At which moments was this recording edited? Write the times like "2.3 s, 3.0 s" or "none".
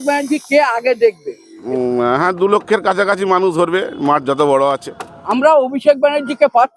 1.6 s, 5.3 s